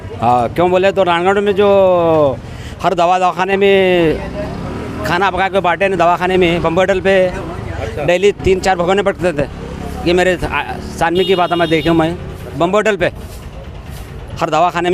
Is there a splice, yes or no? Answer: no